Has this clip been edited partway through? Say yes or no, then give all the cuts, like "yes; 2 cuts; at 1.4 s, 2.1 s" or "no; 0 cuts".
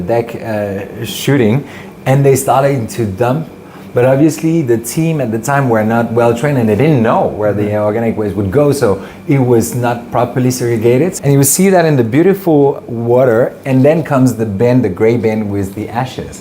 yes; 1 cut; at 11.1 s